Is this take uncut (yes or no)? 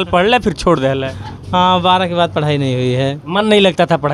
yes